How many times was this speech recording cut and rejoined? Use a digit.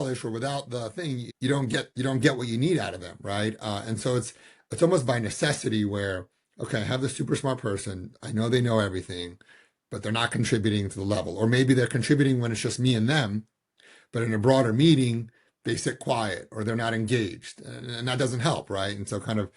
2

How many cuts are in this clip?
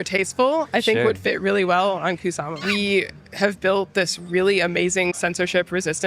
2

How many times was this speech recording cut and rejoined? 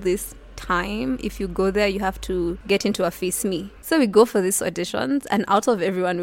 1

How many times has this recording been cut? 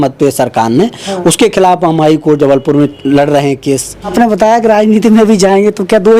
1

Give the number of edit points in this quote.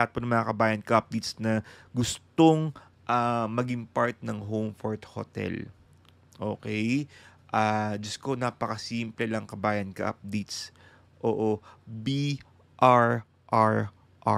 0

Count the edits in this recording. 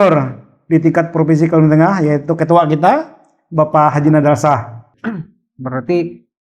1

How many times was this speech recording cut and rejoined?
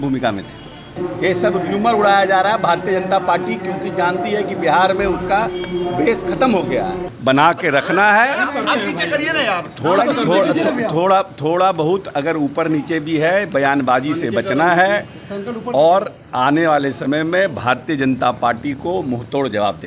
2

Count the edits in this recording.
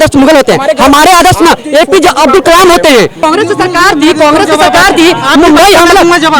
1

